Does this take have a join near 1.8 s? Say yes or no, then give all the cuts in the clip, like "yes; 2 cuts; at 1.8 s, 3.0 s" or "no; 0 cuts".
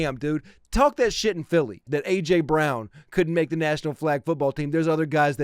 yes; 1 cut; at 1.8 s